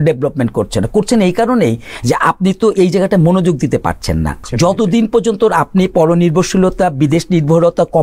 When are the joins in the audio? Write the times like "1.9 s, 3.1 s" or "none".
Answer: 4.4 s